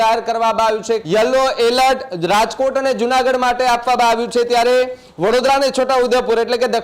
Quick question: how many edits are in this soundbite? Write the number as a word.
one